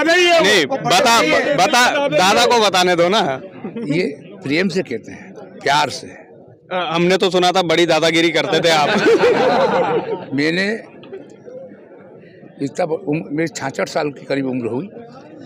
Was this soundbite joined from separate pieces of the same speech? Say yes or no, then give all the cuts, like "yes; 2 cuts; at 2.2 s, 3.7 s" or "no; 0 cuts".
no; 0 cuts